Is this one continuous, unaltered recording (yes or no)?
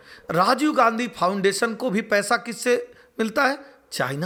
yes